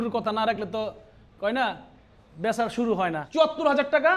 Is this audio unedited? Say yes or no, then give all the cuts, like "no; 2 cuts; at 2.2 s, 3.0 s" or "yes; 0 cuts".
no; 1 cut; at 3.2 s